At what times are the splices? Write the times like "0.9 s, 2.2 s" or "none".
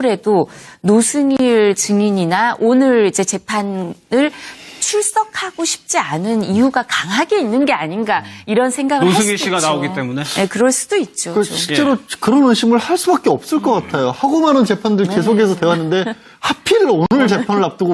4.2 s